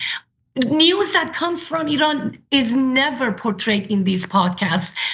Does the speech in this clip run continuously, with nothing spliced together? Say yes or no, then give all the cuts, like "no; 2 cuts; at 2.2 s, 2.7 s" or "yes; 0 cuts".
yes; 0 cuts